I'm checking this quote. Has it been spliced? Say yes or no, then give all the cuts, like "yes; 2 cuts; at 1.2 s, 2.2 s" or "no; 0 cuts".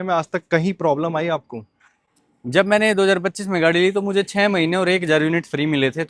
no; 0 cuts